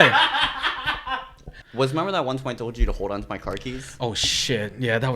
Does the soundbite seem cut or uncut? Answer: cut